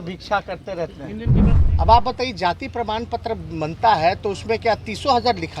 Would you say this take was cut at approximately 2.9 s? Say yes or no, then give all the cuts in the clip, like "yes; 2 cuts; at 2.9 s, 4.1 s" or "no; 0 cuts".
no; 1 cut; at 1.5 s